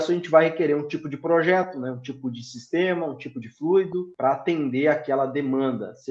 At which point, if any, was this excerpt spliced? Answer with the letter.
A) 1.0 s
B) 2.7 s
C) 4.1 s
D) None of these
C